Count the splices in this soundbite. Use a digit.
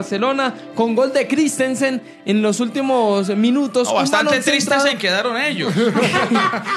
0